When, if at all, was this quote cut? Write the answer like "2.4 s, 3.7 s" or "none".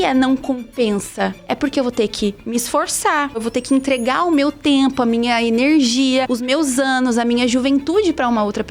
3.4 s, 6.3 s